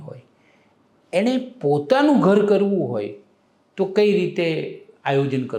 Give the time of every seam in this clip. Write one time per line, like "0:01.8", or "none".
none